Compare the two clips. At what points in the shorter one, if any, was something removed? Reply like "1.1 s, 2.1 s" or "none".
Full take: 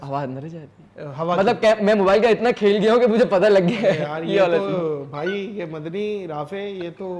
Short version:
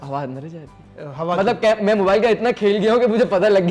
none